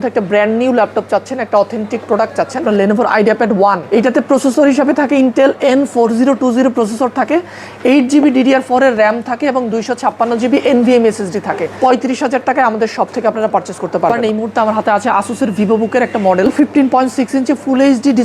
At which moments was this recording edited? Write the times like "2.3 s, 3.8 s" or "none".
2.6 s, 3.8 s, 11.7 s, 14.2 s, 16.5 s